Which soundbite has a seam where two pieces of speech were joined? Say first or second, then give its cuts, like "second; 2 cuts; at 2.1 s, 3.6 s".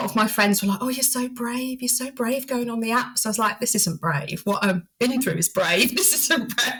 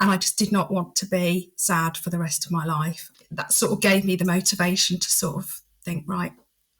second; 1 cut; at 3.1 s